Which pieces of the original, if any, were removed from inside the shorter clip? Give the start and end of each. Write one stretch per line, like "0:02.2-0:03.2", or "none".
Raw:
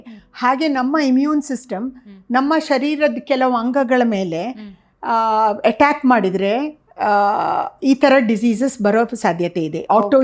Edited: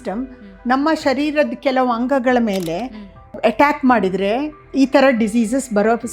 0:05.0-0:05.6
0:06.8-0:07.7